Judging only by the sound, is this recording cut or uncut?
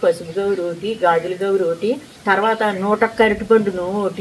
cut